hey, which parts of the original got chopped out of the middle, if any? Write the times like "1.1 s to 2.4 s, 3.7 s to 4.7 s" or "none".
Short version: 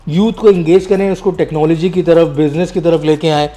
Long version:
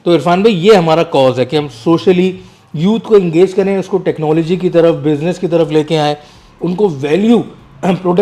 none